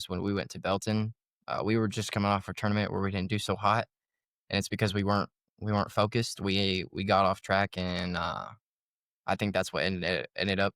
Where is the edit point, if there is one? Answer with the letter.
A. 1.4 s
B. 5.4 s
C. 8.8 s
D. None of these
D